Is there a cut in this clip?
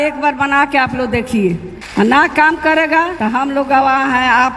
yes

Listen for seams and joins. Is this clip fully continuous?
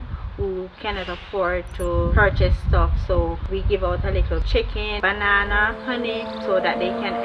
yes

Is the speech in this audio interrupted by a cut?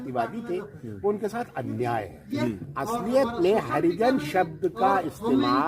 yes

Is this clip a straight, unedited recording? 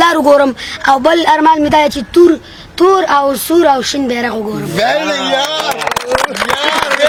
yes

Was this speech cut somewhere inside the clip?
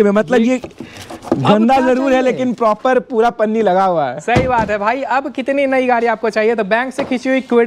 no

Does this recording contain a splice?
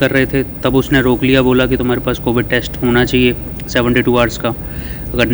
no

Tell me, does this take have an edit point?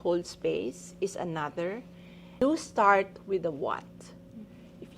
yes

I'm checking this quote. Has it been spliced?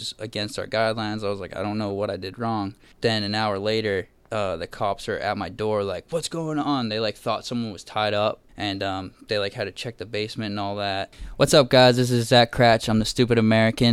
yes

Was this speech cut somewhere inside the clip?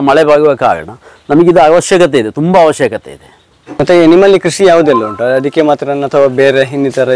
no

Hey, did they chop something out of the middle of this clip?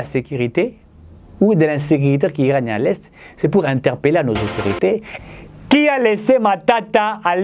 yes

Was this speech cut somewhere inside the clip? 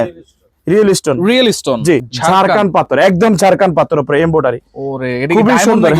yes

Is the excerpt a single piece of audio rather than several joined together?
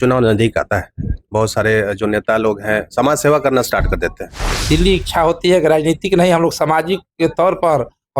no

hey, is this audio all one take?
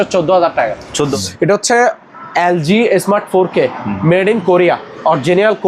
no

